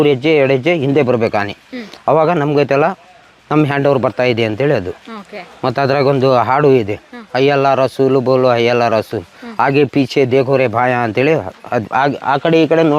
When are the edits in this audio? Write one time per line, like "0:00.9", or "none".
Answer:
none